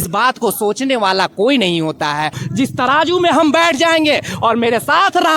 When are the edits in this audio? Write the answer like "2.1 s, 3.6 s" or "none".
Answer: 2.4 s